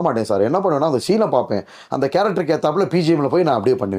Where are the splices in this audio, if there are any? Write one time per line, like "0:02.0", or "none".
none